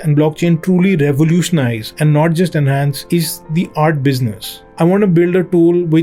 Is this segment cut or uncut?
cut